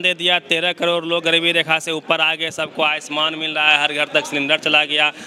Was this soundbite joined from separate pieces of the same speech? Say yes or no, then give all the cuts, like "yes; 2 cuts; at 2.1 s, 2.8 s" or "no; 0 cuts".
no; 0 cuts